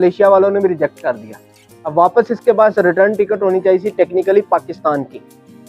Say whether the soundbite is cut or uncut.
uncut